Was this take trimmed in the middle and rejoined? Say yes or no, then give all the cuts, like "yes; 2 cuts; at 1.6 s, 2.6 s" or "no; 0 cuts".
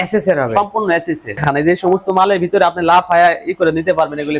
yes; 1 cut; at 1.4 s